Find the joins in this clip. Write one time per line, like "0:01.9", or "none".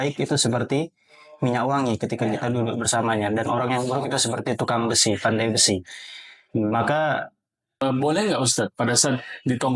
0:07.8

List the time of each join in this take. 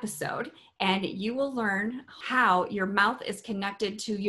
0:02.1

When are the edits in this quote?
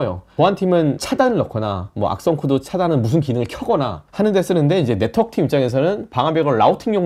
none

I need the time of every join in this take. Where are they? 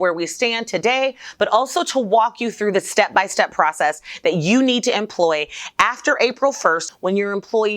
0:06.8

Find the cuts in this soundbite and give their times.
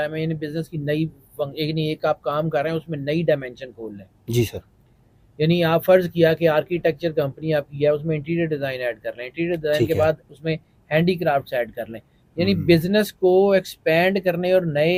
none

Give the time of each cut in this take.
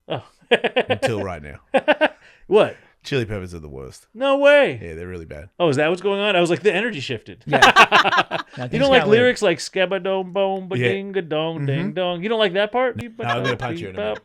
0:13.0

